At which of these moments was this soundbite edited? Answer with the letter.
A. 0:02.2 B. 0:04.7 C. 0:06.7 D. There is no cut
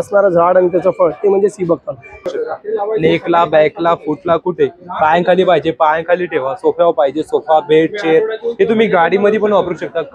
A